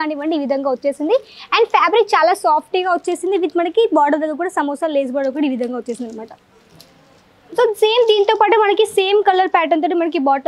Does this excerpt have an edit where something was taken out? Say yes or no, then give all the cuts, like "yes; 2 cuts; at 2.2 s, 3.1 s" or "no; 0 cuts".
no; 0 cuts